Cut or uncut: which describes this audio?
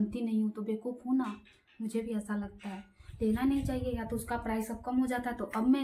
uncut